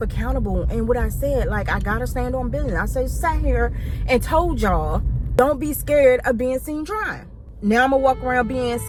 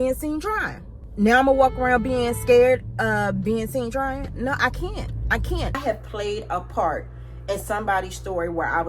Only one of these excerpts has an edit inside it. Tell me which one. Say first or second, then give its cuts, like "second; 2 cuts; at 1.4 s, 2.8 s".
second; 1 cut; at 5.8 s